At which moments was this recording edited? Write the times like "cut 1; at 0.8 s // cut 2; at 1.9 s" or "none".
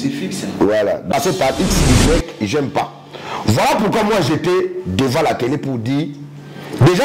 cut 1; at 1.1 s